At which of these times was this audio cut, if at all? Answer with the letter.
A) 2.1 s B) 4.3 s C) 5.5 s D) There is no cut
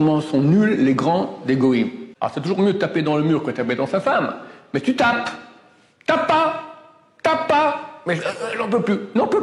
A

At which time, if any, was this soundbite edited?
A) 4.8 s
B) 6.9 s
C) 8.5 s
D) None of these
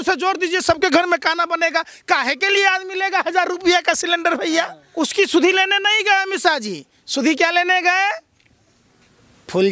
A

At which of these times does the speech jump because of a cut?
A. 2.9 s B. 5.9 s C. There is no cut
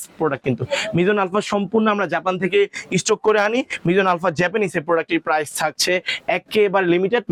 C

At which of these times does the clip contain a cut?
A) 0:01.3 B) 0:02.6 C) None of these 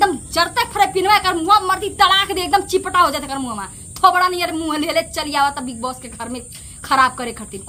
C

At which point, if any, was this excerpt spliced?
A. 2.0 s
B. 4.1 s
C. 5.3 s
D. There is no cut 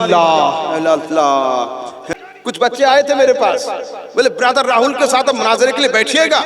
A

